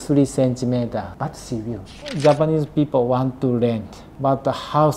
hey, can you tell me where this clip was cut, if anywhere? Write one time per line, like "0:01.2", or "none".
0:01.9
0:04.1